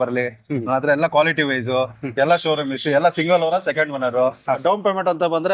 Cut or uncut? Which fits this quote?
cut